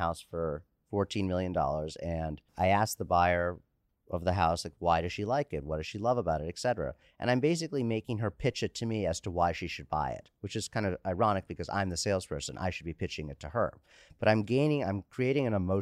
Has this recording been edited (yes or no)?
yes